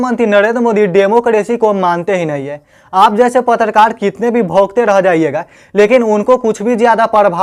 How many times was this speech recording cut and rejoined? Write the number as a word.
zero